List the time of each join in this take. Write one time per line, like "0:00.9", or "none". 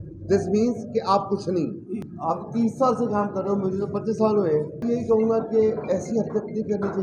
0:02.0
0:04.7